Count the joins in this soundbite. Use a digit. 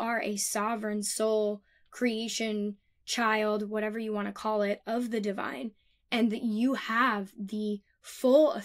0